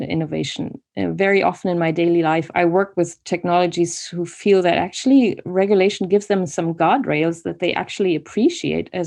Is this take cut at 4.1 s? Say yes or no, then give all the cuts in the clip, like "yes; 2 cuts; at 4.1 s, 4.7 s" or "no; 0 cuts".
no; 1 cut; at 2.5 s